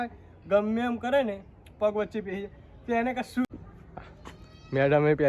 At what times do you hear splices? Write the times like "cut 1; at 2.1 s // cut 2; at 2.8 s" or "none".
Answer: cut 1; at 3.5 s